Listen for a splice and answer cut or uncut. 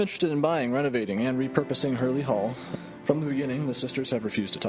cut